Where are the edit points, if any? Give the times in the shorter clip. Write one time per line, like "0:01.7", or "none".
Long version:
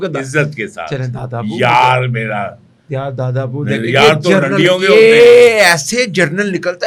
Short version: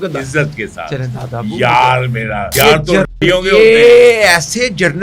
0:02.5